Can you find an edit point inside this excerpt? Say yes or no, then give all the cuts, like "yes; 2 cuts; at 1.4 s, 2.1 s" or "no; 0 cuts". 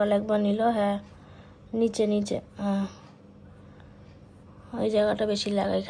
no; 0 cuts